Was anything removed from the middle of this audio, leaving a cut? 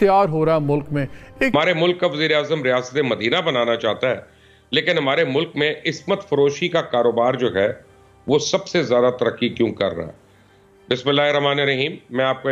yes; 1 cut; at 1.5 s

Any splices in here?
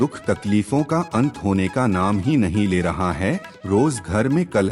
no; 0 cuts

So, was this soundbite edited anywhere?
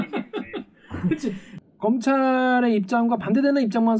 yes; 1 cut; at 1.5 s

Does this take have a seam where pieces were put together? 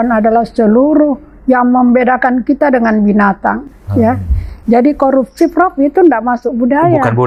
no; 0 cuts

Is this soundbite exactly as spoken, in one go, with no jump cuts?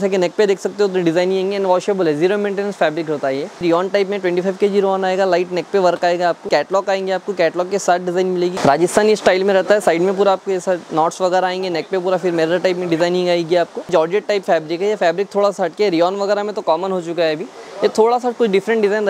no; 4 cuts; at 3.6 s, 6.4 s, 8.5 s, 13.9 s

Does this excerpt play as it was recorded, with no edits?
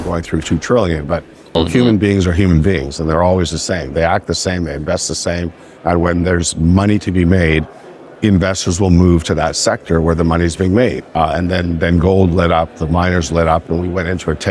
no; 2 cuts; at 1.5 s, 11.0 s

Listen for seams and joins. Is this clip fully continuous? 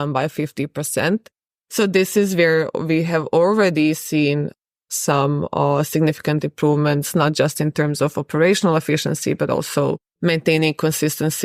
yes; 0 cuts

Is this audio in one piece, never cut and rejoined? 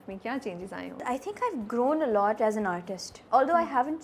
no; 2 cuts; at 1.0 s, 3.1 s

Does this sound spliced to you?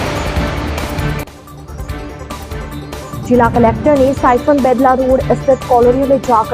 yes; 1 cut; at 1.4 s

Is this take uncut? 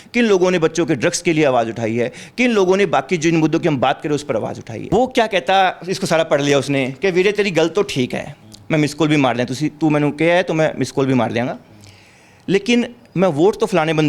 no; 1 cut; at 4.9 s

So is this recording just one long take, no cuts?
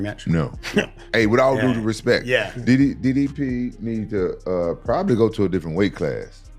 no; 1 cut; at 1.0 s

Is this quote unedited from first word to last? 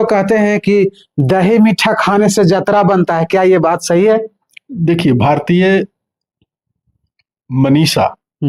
yes; 0 cuts

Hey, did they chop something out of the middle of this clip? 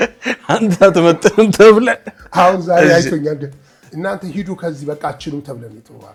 no; 0 cuts

